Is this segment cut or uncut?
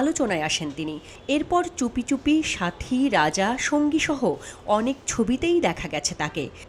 uncut